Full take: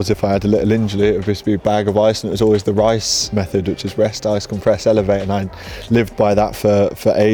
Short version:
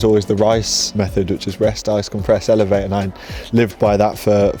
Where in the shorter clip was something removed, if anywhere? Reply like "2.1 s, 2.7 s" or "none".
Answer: none

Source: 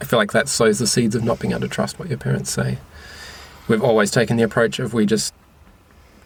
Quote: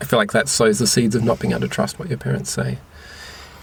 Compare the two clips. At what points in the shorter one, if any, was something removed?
none

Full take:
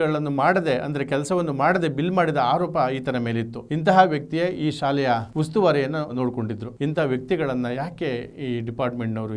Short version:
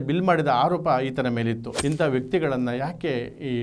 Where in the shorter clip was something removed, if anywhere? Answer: 1.7 s

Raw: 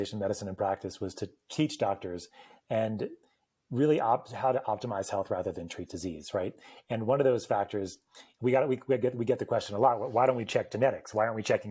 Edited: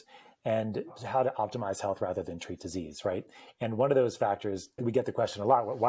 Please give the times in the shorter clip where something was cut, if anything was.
1.0 s, 4.8 s

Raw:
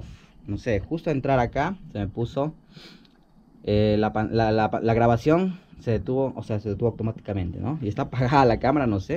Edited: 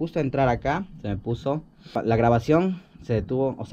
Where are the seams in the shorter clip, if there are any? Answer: 2.0 s

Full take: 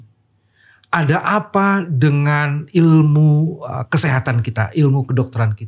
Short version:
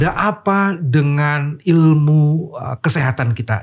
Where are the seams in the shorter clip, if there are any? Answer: none

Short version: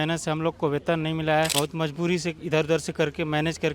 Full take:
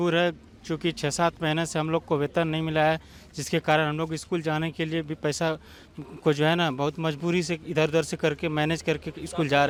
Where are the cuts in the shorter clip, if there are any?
1.5 s

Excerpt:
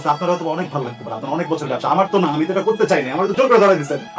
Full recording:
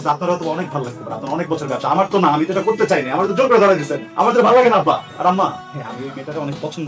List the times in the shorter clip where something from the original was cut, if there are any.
none

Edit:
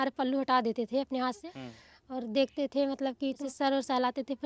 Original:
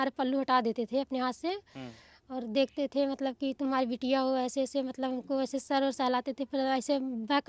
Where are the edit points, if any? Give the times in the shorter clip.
1.5 s, 3.4 s

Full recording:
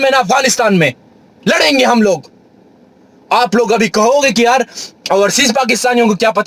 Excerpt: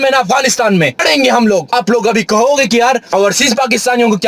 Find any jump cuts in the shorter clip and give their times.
1.0 s, 1.7 s, 3.0 s

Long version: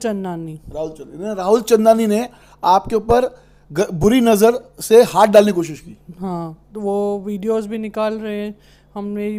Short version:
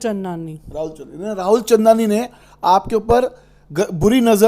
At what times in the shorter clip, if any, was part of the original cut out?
none

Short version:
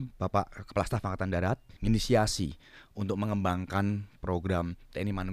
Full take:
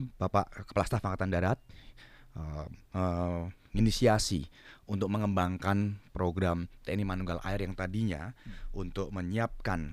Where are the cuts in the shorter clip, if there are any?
1.7 s

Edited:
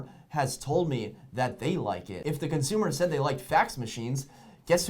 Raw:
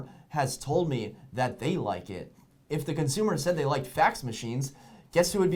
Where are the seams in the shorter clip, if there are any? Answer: 2.1 s

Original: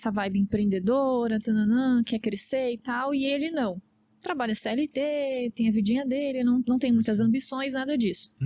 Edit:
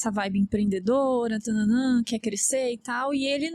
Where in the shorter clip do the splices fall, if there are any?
none

